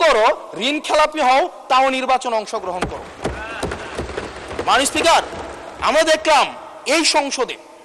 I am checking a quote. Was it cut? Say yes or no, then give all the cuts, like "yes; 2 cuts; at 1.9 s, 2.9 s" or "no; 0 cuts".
no; 0 cuts